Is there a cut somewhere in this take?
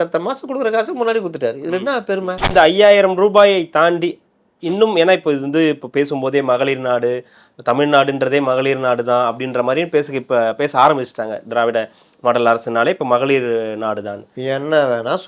yes; 1 cut; at 2.5 s

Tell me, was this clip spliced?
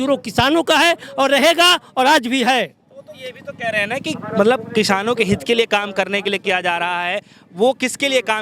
no; 0 cuts

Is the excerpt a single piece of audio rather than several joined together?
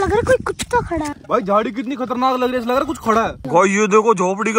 no; 2 cuts; at 1.1 s, 3.5 s

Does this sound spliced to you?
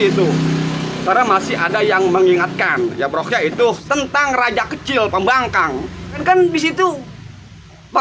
yes; 2 cuts; at 3.8 s, 6.2 s

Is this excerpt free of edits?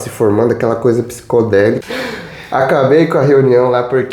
no; 1 cut; at 1.8 s

